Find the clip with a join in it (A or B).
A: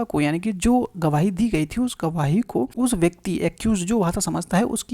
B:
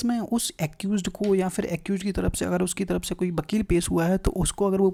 A